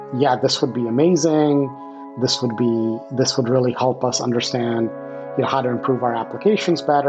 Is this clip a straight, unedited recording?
yes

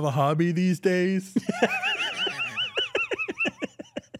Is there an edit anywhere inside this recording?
no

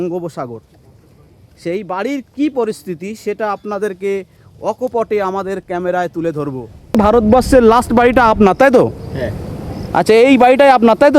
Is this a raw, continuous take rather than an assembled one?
no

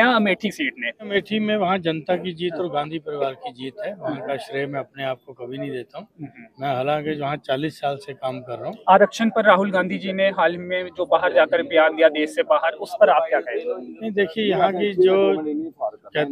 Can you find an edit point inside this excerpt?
yes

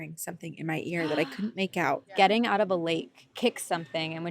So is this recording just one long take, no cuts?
no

